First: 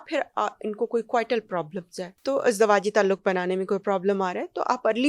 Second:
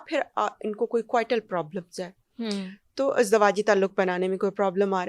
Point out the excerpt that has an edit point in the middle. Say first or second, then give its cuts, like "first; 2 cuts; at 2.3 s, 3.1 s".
first; 1 cut; at 2.1 s